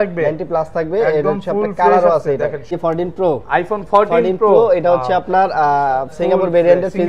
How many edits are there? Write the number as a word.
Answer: one